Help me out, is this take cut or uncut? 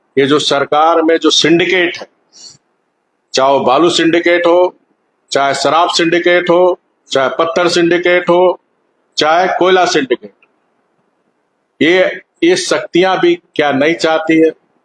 uncut